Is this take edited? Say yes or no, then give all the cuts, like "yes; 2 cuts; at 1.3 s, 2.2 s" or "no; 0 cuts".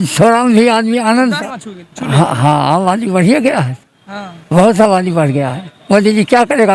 yes; 1 cut; at 1.4 s